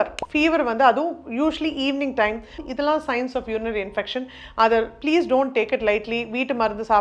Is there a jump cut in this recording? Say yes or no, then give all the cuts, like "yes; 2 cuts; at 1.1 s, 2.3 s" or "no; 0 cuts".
yes; 1 cut; at 2.6 s